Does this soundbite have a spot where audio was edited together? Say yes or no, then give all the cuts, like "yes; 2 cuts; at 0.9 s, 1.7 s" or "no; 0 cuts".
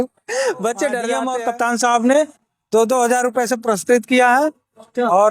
yes; 1 cut; at 1.3 s